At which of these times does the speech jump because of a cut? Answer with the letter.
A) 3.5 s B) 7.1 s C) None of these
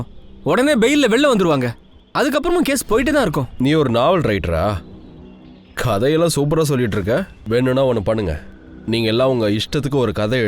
A